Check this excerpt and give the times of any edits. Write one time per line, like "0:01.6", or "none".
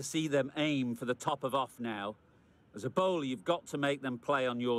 none